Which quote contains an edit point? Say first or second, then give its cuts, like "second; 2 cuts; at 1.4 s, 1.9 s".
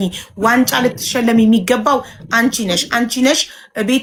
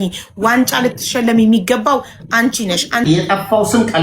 second; 1 cut; at 3.1 s